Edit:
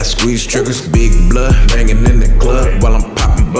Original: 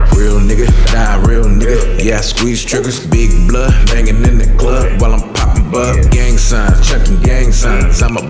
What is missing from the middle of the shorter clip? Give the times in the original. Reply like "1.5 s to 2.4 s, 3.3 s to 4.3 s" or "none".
none